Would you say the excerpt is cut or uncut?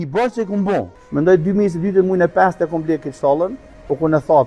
cut